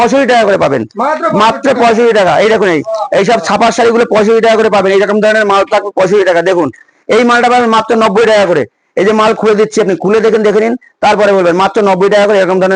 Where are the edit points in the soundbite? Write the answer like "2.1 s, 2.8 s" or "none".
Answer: none